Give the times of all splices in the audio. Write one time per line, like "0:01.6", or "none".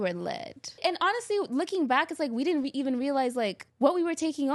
0:00.8
0:03.6